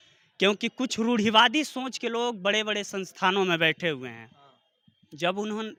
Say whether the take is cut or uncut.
uncut